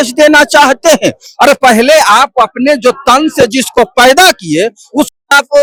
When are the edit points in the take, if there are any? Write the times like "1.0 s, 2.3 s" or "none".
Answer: none